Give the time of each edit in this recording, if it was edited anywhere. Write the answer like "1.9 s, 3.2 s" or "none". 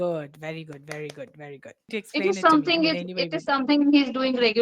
2.0 s